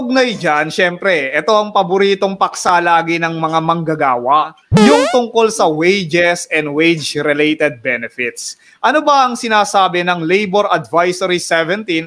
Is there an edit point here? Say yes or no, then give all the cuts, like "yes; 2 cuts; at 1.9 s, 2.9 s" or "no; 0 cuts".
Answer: no; 0 cuts